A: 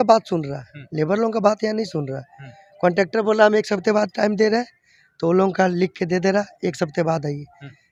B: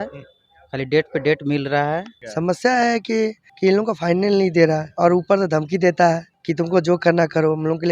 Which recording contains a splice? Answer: B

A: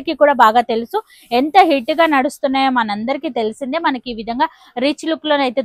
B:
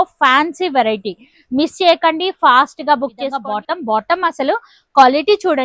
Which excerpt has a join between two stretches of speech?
B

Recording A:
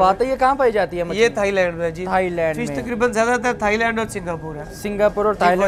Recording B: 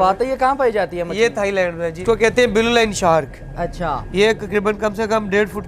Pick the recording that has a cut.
B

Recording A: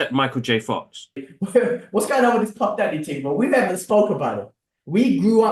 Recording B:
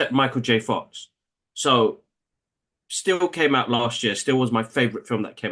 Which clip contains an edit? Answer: A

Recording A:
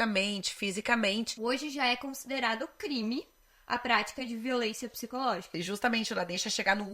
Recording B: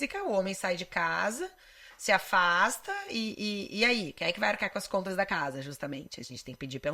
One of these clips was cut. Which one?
A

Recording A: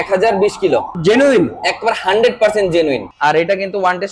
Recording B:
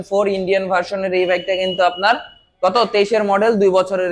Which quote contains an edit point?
A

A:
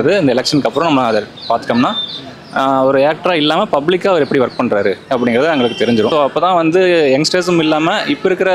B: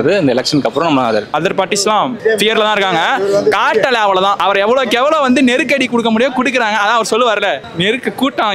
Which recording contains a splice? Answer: B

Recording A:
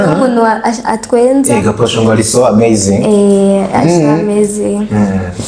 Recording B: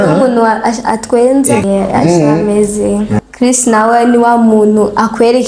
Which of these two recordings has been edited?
B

